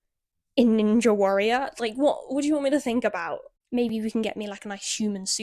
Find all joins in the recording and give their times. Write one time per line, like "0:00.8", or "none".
0:03.5